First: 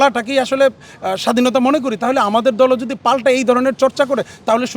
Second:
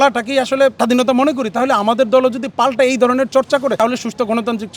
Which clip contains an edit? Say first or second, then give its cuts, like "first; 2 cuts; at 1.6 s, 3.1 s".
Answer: second; 2 cuts; at 0.8 s, 3.8 s